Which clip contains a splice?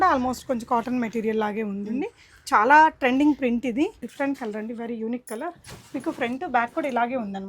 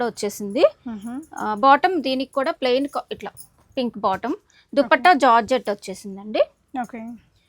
first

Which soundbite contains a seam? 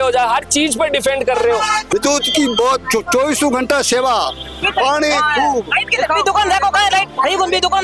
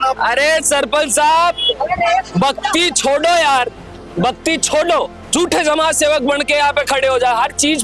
first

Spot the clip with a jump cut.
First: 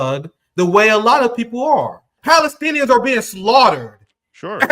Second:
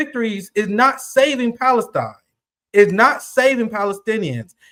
first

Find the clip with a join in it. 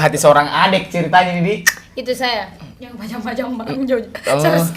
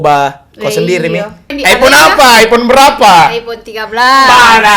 second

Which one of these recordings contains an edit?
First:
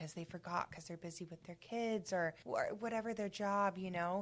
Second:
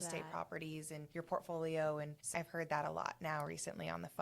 second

